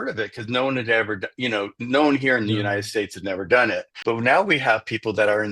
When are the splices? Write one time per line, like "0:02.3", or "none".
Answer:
0:03.9